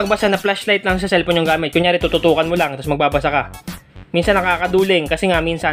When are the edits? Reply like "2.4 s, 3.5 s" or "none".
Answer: none